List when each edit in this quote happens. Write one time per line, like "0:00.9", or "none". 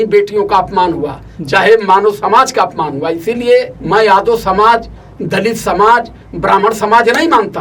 0:03.8